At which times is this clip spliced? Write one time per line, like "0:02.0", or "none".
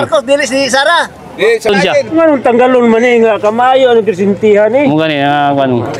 0:01.7